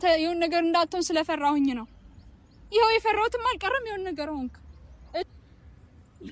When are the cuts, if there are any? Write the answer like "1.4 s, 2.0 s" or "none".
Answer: 5.3 s

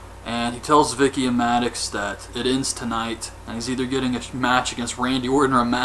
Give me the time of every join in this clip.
none

